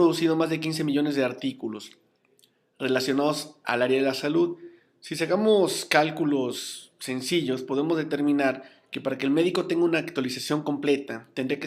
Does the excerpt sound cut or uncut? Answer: cut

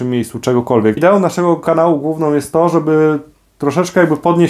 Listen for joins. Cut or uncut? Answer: cut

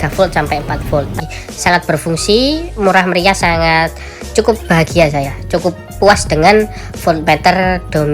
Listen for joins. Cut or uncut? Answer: cut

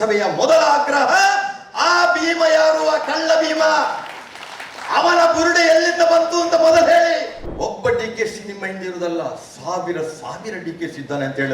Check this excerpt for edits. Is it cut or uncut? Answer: cut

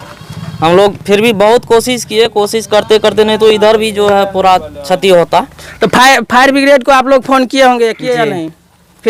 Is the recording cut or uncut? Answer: uncut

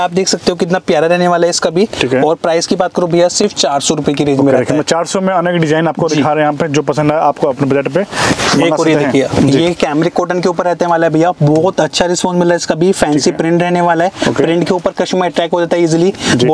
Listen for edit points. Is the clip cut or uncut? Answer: uncut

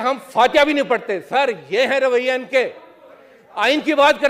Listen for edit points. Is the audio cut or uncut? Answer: uncut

